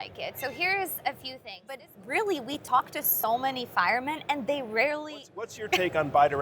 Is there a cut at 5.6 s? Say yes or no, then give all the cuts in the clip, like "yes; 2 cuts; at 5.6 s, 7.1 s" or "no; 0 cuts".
yes; 2 cuts; at 1.9 s, 5.6 s